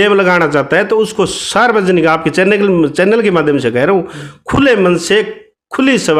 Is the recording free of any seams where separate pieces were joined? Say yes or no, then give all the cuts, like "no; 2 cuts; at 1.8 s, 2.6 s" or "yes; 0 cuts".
yes; 0 cuts